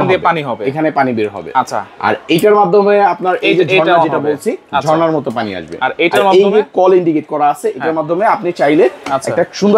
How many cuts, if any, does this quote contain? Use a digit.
0